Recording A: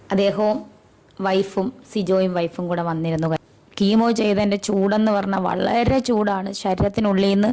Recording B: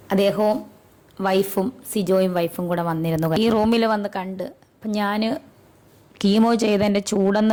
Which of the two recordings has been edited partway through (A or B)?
A